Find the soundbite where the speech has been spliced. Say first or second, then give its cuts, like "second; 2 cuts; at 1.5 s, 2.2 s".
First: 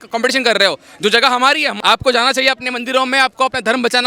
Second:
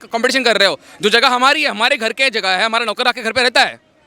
first; 1 cut; at 1.7 s